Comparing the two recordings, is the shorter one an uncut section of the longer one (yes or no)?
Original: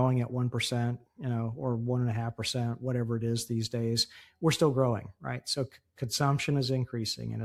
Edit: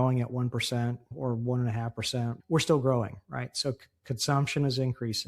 no